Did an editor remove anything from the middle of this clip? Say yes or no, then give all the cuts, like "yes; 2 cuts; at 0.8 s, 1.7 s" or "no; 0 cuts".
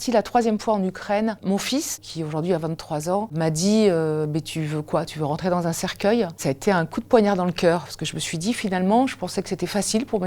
yes; 3 cuts; at 2.0 s, 3.3 s, 6.4 s